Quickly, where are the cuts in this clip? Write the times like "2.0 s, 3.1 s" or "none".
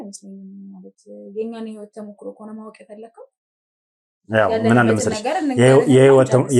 none